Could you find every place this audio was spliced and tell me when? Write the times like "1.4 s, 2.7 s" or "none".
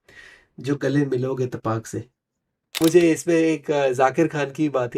2.8 s